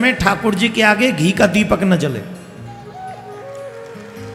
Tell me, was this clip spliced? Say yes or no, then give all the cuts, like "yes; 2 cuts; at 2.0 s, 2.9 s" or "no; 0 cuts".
no; 0 cuts